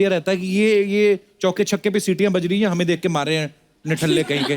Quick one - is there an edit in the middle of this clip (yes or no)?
no